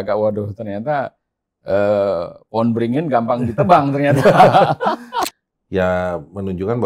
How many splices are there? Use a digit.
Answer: 1